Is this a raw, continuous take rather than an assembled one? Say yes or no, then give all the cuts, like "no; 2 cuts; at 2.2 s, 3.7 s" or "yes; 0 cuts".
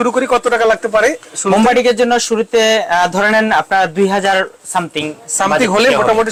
yes; 0 cuts